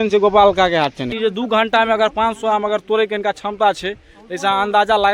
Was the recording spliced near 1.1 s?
yes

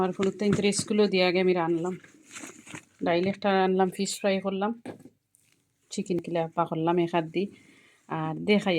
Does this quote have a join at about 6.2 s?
yes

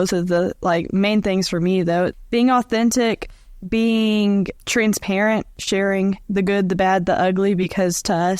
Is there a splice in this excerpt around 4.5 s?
yes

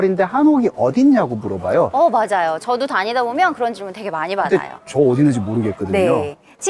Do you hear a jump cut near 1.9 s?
no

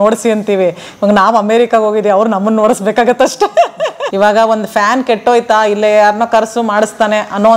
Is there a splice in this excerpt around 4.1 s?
yes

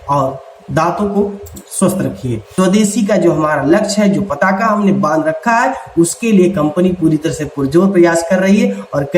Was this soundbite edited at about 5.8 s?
no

